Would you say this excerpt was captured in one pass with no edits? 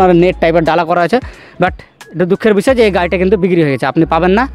yes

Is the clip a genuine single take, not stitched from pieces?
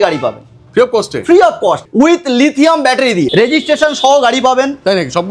no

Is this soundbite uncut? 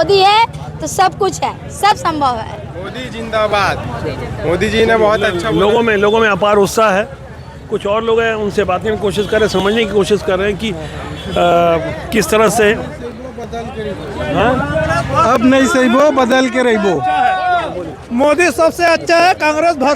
yes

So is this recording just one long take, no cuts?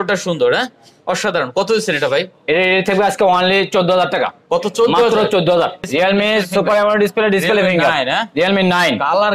no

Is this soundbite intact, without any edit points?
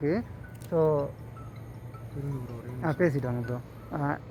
yes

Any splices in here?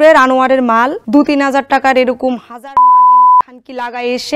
yes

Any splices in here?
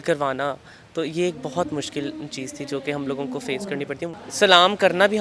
yes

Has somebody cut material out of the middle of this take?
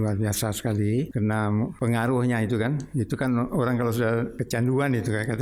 yes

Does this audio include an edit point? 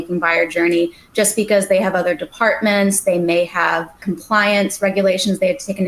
yes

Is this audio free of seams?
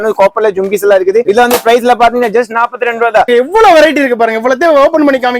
no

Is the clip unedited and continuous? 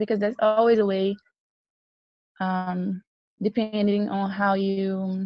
yes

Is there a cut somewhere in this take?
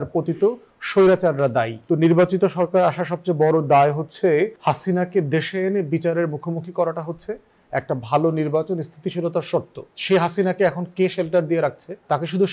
yes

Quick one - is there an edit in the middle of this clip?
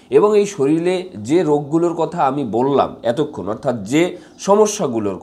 no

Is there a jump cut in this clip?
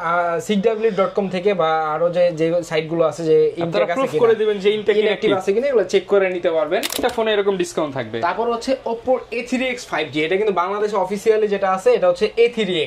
yes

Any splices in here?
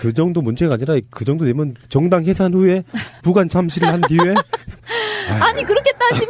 no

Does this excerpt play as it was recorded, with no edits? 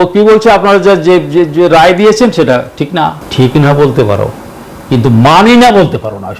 no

